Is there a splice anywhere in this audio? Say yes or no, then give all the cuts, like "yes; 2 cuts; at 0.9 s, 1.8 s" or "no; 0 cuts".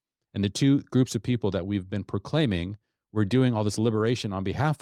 no; 0 cuts